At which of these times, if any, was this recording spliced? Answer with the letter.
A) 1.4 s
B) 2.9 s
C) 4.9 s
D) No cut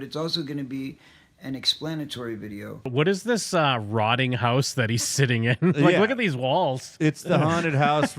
B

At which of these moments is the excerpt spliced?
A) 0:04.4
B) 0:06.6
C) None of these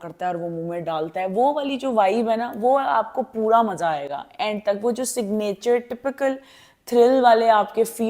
C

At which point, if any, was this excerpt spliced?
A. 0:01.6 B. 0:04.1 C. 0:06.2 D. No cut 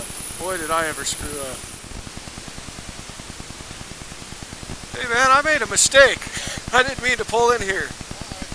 A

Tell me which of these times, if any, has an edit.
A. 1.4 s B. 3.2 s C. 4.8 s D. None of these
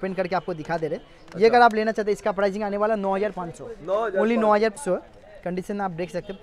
C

